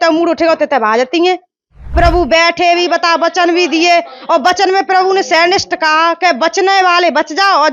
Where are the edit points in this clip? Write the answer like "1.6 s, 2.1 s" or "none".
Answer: 1.9 s